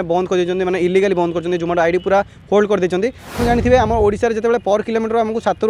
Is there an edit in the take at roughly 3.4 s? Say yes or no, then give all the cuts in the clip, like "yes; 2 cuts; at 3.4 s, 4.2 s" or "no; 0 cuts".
yes; 1 cut; at 3.4 s